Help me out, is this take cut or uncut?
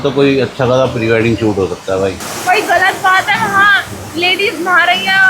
cut